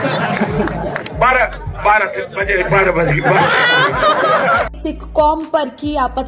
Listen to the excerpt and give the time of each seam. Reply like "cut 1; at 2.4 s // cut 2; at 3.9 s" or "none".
cut 1; at 3.1 s // cut 2; at 4.8 s